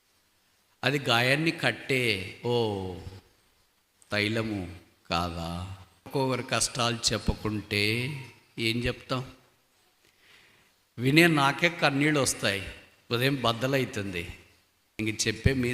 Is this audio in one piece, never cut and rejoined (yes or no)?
no